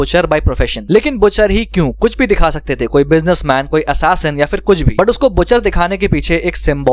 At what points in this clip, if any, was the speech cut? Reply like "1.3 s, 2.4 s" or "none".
none